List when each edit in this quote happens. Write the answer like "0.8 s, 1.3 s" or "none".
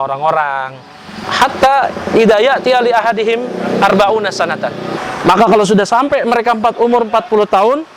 1.2 s, 4.9 s